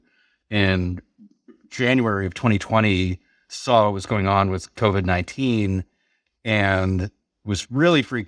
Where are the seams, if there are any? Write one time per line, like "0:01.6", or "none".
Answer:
none